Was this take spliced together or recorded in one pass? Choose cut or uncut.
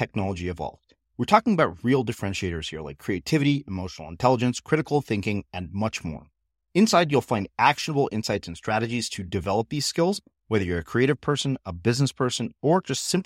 uncut